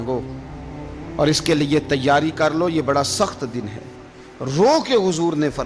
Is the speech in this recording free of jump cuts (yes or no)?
yes